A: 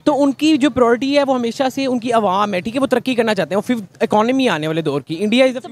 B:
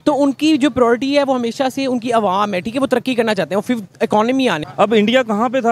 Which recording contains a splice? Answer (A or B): B